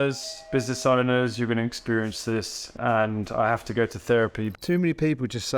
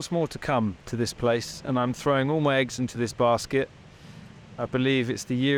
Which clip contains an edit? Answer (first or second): first